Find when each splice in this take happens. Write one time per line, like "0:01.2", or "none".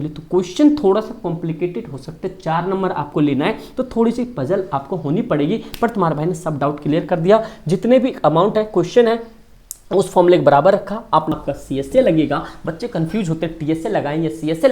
0:11.3